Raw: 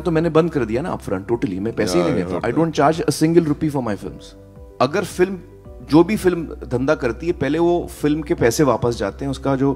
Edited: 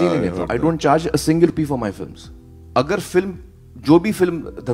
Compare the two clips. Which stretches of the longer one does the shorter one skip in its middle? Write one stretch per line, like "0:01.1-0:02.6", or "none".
0:03.4-0:03.5